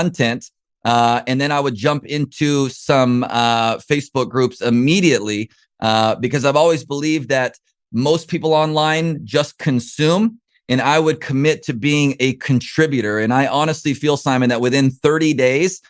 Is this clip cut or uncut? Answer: uncut